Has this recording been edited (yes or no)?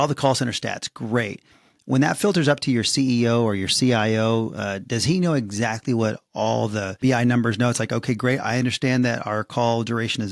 yes